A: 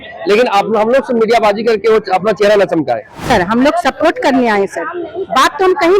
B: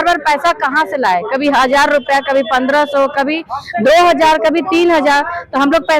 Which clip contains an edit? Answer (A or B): A